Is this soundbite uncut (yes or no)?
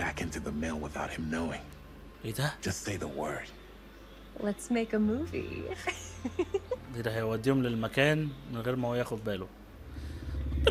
yes